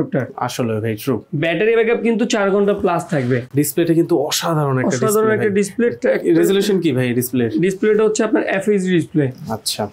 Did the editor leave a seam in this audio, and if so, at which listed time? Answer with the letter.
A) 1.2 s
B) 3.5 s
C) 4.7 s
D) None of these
B